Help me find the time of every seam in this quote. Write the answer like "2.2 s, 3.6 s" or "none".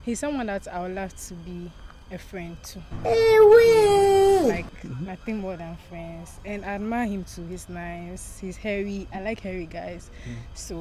none

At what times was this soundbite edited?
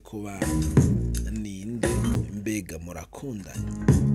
2.1 s

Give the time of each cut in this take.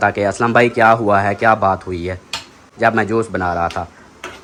none

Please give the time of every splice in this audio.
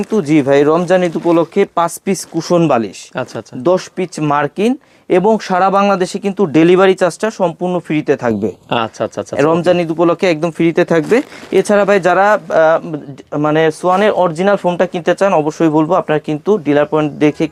none

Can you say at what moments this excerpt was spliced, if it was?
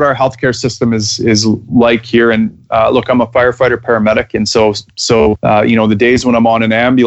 none

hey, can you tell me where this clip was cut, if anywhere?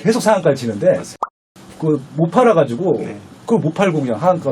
1.4 s

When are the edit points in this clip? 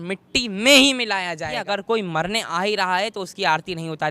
1.6 s

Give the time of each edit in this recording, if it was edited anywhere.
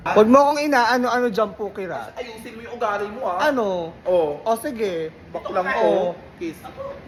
none

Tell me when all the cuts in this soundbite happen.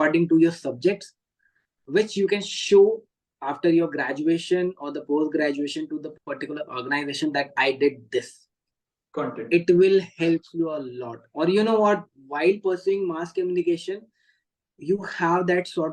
none

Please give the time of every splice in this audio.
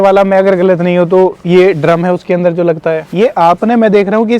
3.1 s

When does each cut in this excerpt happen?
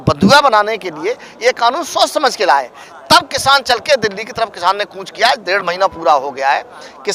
none

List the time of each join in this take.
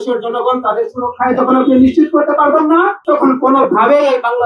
3.0 s

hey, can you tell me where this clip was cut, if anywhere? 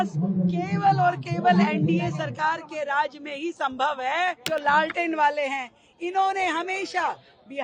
4.4 s

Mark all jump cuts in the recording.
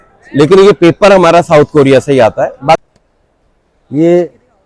2.8 s

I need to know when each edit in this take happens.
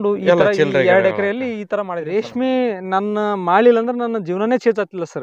1.8 s

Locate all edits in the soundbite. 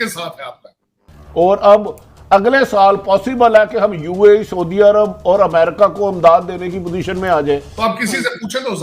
1.0 s, 7.7 s

